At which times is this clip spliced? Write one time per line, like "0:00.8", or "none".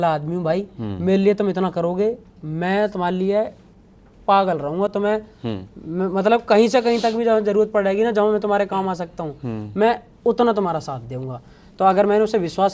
none